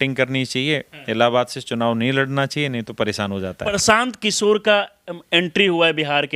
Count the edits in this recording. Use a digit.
1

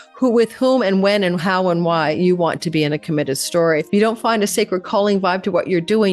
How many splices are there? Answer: 1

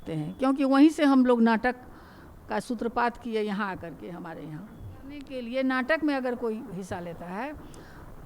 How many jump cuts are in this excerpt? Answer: 1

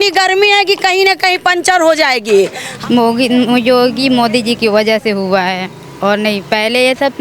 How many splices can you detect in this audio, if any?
1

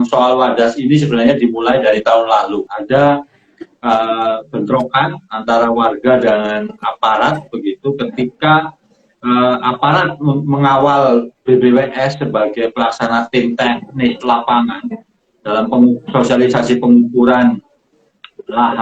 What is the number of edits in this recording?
1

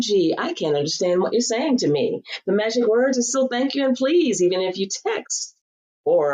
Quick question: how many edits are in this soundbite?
0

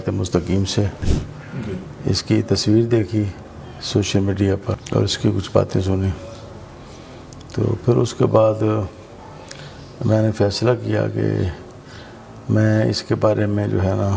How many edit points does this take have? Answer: 2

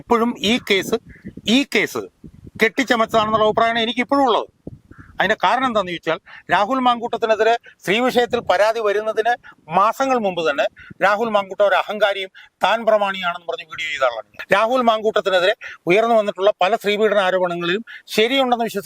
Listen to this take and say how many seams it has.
0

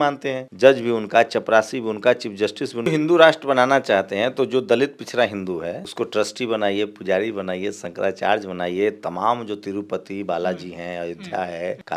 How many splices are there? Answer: 1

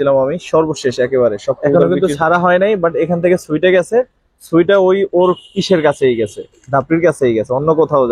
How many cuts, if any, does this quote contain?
1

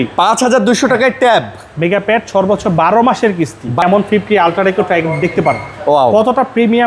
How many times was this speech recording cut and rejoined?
1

